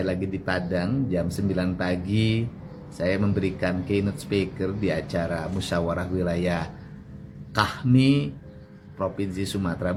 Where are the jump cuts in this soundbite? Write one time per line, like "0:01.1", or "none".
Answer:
none